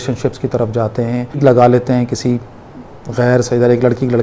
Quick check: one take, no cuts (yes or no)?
no